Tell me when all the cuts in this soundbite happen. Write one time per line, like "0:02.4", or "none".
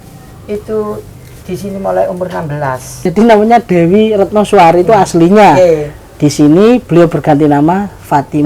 0:03.0